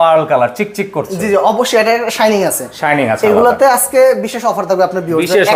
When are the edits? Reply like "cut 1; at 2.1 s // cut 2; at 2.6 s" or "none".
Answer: none